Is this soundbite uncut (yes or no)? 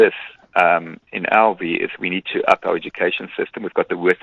yes